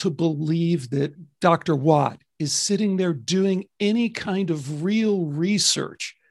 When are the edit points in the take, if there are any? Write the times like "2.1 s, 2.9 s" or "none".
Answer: 1.2 s